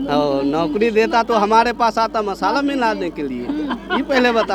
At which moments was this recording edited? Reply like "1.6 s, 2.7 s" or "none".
none